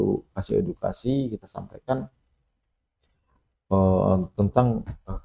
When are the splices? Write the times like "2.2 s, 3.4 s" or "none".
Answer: none